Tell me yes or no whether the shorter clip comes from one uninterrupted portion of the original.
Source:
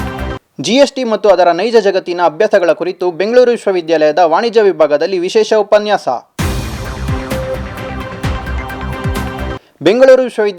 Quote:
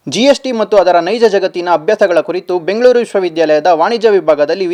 yes